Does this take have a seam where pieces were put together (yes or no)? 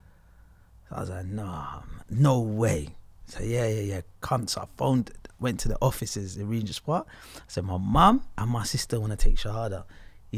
no